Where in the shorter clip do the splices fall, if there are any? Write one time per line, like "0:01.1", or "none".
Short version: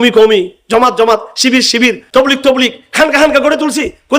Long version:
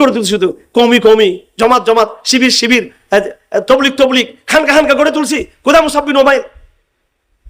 0:02.1